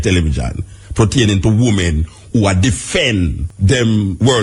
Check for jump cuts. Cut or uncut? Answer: cut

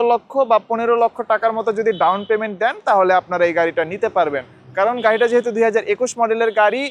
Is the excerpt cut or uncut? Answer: uncut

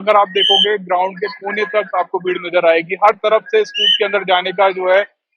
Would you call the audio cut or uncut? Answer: uncut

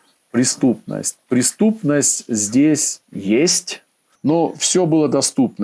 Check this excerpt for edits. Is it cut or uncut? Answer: cut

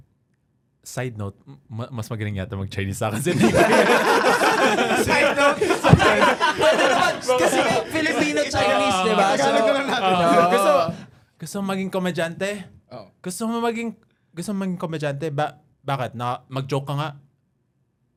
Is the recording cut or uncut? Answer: uncut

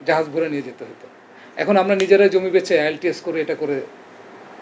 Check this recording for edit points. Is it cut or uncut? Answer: uncut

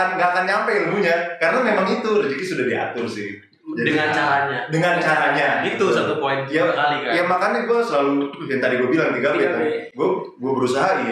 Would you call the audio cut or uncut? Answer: uncut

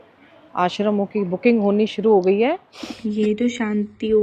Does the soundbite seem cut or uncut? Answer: cut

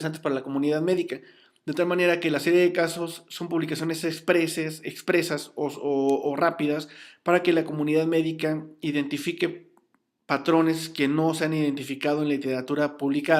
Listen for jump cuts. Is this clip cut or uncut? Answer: uncut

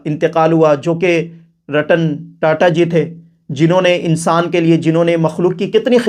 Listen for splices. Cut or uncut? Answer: uncut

